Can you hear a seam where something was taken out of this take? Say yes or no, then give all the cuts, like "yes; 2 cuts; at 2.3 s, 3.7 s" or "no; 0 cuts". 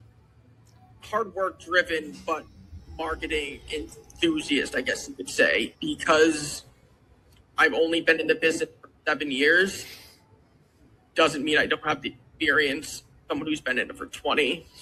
no; 0 cuts